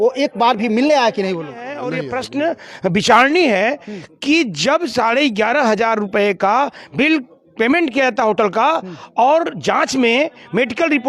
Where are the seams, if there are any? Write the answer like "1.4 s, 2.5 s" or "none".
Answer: 1.8 s

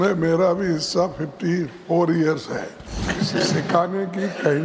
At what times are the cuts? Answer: 3.1 s

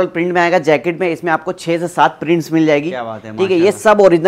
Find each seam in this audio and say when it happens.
none

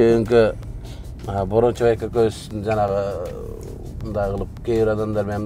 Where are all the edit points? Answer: none

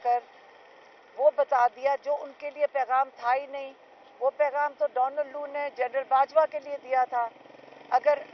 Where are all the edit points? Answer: none

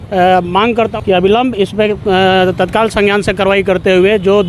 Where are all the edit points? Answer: 0.9 s

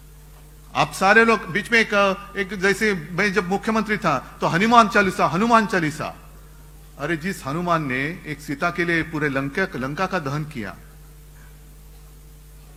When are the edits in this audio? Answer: none

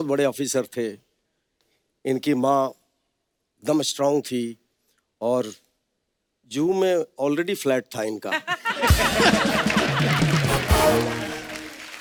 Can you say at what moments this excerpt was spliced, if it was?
none

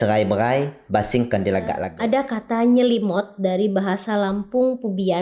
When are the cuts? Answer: 1.9 s

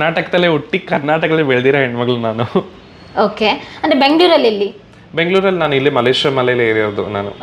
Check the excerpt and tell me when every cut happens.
none

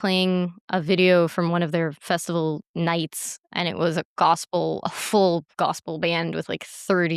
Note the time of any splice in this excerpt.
2.7 s

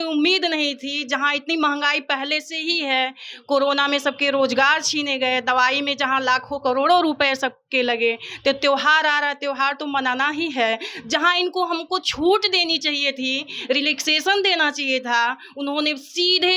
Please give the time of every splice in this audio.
none

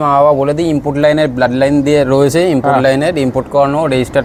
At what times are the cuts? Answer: none

